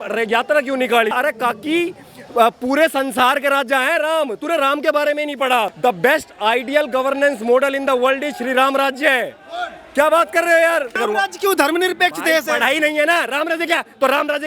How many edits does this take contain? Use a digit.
3